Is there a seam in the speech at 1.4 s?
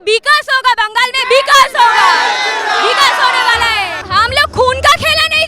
no; 1 cut; at 4.0 s

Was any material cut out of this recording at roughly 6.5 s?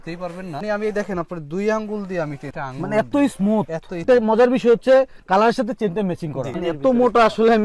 yes; 1 cut; at 6.5 s

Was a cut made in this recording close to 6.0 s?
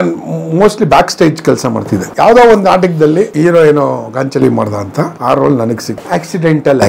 yes; 4 cuts; at 2.0 s, 3.3 s, 5.2 s, 6.0 s

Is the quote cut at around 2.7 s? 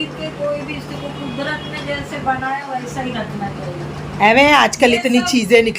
no; 1 cut; at 4.1 s

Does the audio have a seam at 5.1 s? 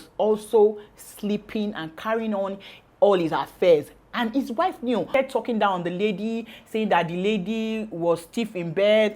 yes; 1 cut; at 5.1 s

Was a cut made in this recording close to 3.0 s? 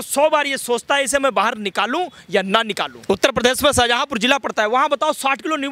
yes; 1 cut; at 3.0 s

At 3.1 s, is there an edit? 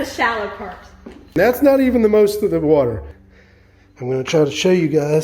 yes; 1 cut; at 3.1 s

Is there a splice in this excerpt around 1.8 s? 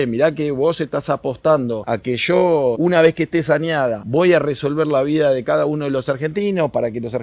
yes; 3 cuts; at 1.8 s, 2.8 s, 4.0 s

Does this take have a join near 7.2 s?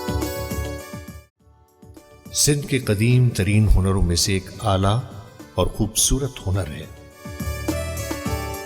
yes; 2 cuts; at 1.7 s, 7.2 s

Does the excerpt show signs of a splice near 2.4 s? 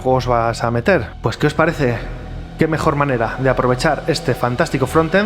no; 1 cut; at 1.1 s

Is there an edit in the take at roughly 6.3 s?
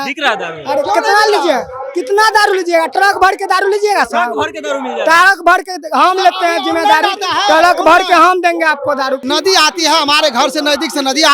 no; 1 cut; at 9.2 s

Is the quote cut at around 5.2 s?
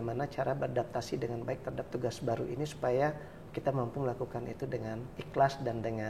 yes; 1 cut; at 5.2 s

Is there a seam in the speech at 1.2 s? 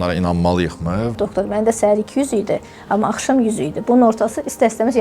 yes; 1 cut; at 1.2 s

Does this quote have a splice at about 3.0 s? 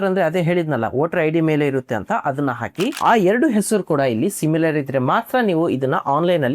yes; 1 cut; at 3.0 s

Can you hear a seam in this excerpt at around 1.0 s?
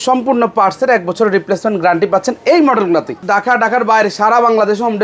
no; 1 cut; at 3.2 s

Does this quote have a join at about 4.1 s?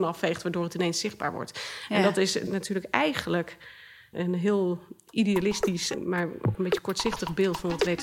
yes; 3 cuts; at 2.4 s, 4.1 s, 5.9 s

